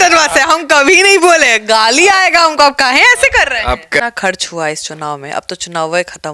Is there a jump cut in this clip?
yes; 1 cut; at 4.0 s

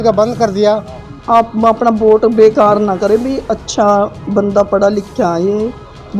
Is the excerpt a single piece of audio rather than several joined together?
no; 1 cut; at 1.2 s

